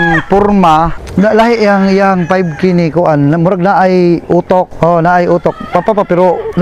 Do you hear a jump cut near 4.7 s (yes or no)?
yes